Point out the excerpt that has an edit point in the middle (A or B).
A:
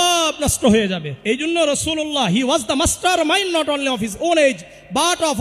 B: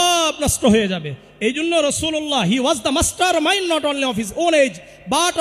A